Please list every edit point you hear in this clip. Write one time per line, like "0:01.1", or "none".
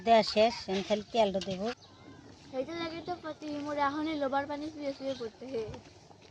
0:01.8